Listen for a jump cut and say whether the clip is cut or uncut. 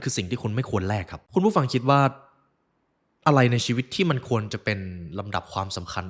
cut